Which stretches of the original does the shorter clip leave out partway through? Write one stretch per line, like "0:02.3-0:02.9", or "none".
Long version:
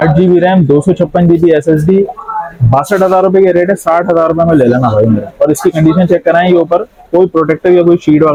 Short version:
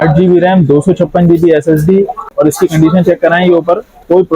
0:02.2-0:05.3